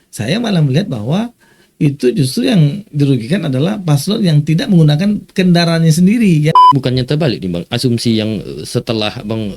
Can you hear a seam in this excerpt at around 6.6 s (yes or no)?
yes